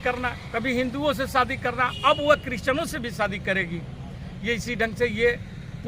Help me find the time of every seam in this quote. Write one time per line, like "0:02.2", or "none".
none